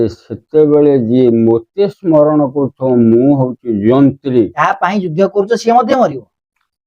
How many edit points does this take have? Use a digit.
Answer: 1